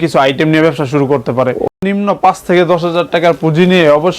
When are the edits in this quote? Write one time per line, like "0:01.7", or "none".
0:01.7